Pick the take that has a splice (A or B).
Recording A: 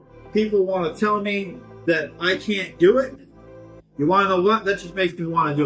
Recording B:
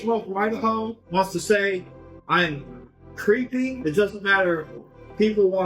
B